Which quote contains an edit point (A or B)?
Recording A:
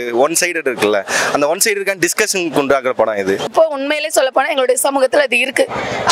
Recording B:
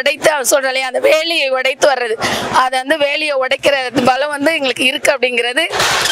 A